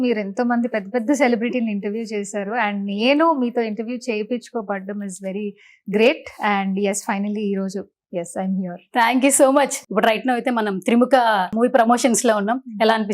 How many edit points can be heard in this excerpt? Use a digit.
2